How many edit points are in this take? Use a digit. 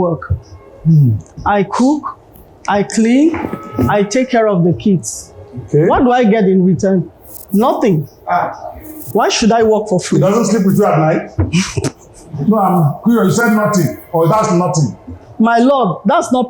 1